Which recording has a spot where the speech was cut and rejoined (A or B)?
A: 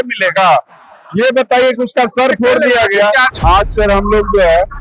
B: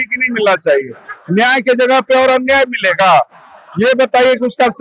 A